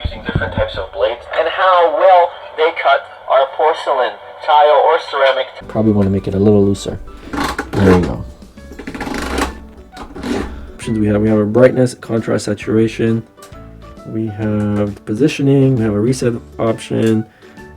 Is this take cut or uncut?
cut